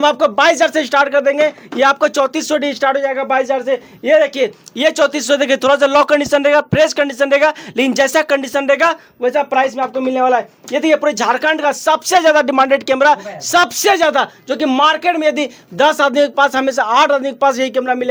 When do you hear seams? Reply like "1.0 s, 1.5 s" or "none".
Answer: none